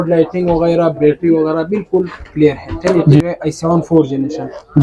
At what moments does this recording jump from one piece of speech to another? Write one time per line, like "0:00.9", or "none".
0:03.2